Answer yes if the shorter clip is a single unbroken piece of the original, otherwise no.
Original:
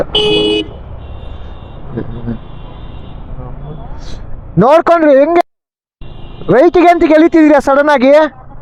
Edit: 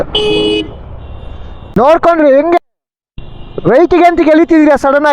no